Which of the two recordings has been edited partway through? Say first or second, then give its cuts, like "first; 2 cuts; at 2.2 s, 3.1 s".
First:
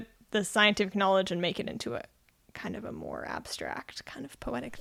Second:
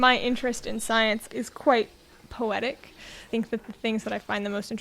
second; 2 cuts; at 1.2 s, 3.3 s